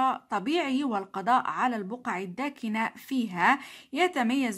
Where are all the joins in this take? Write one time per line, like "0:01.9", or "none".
none